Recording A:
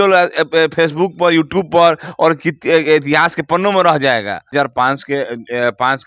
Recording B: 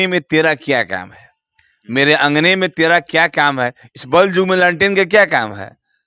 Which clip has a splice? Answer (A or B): A